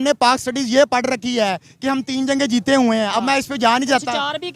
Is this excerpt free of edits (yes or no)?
yes